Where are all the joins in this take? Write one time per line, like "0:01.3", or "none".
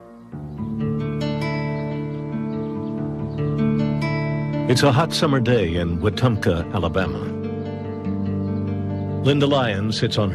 none